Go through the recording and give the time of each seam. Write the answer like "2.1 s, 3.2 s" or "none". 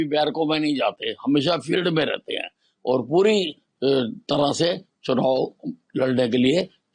none